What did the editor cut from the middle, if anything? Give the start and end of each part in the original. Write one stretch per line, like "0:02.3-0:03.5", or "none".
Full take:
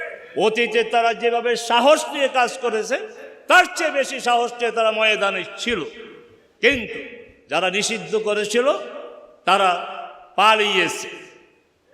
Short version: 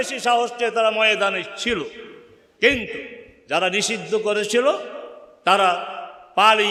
none